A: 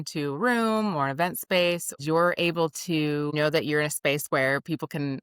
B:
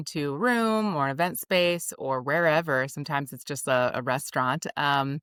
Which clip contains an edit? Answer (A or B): A